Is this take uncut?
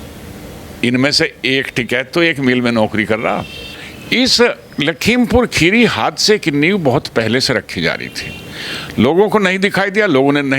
no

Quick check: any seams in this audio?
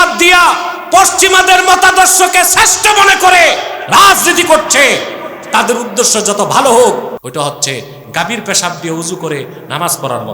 yes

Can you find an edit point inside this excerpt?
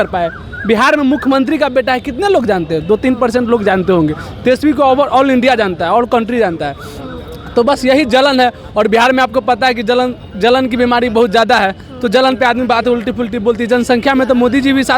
no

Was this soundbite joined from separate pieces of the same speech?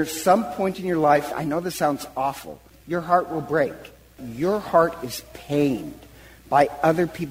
yes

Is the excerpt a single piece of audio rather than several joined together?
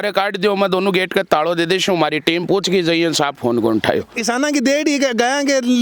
no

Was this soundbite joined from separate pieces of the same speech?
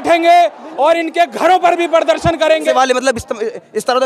yes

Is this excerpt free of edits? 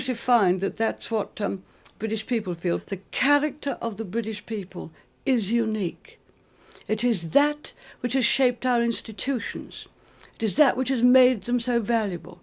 no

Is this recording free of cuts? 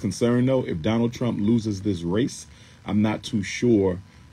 yes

